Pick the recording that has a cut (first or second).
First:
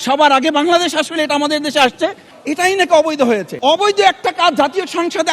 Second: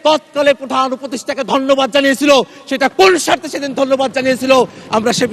first